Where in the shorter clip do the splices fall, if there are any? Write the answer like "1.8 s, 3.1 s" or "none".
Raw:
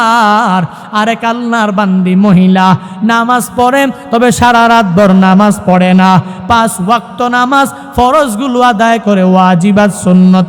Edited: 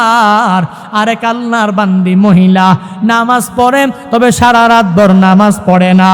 none